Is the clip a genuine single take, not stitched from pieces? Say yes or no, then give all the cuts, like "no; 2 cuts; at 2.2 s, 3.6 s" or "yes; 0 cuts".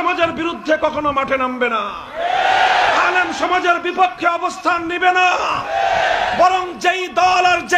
yes; 0 cuts